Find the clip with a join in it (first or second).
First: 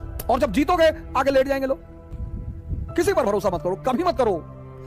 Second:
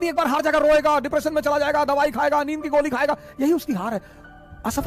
first